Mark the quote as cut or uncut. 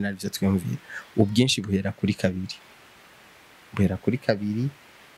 uncut